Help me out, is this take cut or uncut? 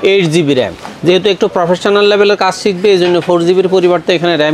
uncut